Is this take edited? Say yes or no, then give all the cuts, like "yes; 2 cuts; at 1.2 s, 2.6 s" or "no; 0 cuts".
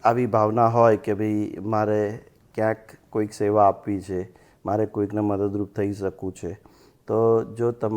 no; 0 cuts